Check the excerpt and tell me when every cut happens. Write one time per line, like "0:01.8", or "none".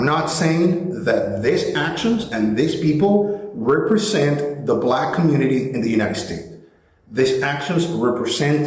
none